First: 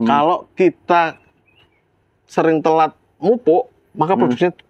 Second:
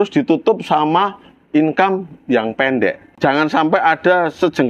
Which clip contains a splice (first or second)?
second